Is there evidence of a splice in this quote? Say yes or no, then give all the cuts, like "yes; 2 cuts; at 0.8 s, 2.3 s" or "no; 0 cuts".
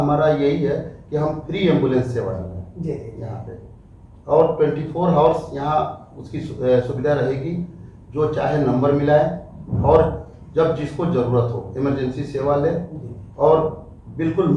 no; 0 cuts